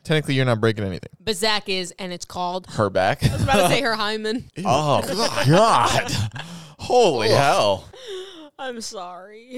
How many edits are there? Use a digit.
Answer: 0